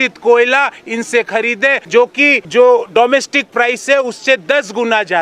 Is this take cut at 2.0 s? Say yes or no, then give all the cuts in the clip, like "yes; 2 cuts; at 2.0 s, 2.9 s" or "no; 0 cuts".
yes; 1 cut; at 2.0 s